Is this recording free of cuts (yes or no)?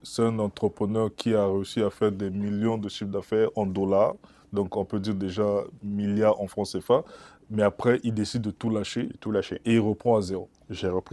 yes